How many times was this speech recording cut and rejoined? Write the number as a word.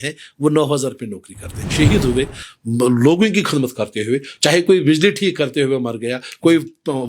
one